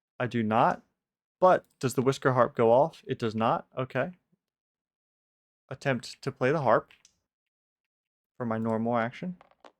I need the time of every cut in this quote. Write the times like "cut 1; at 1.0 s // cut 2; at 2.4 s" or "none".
cut 1; at 4.3 s